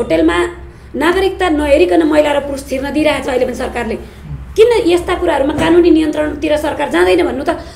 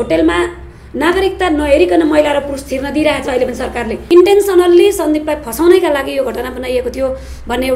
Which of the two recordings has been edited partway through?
second; 1 cut; at 4.1 s

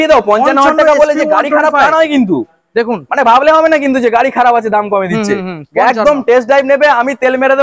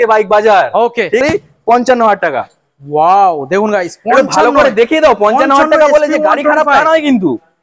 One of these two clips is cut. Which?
second; 1 cut; at 1.2 s

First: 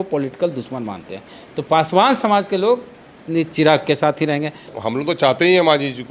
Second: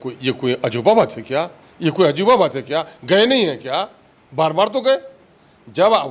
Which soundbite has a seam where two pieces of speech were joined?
first; 1 cut; at 4.7 s

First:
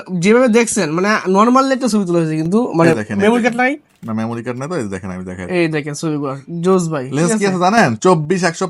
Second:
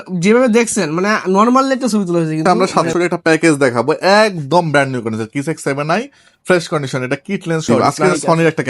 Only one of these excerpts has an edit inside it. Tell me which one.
second; 2 cuts; at 2.4 s, 7.7 s

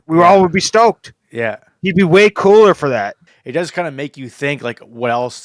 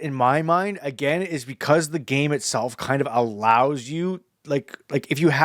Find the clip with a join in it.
first; 1 cut; at 3.3 s

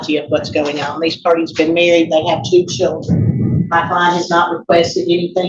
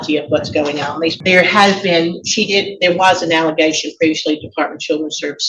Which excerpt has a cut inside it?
second; 1 cut; at 1.2 s

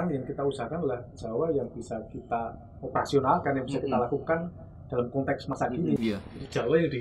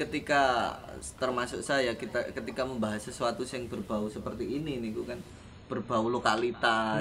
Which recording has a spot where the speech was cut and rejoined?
first; 1 cut; at 5.6 s

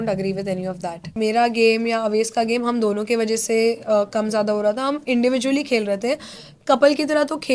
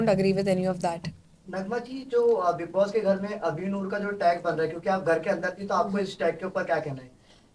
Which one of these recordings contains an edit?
first; 1 cut; at 1.1 s

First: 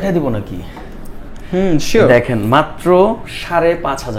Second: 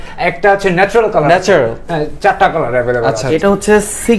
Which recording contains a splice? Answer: second; 1 cut; at 3.3 s

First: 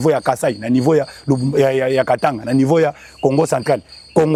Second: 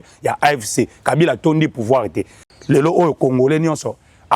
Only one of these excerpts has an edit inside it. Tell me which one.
second; 1 cut; at 2.5 s

